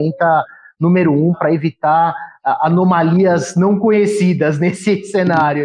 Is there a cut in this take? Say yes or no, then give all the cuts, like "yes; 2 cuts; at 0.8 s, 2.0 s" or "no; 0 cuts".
no; 0 cuts